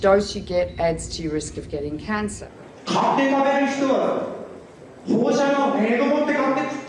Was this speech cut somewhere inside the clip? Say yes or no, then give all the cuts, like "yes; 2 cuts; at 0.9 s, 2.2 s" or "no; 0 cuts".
no; 0 cuts